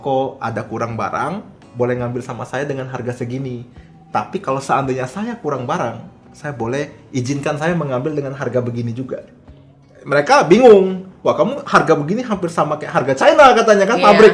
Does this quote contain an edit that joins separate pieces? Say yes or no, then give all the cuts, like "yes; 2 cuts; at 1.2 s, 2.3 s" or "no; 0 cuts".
no; 0 cuts